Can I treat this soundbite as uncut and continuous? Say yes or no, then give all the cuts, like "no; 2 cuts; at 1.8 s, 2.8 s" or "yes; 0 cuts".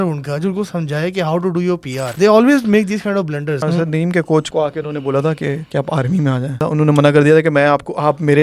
no; 5 cuts; at 2.1 s, 3.6 s, 4.5 s, 5.6 s, 6.6 s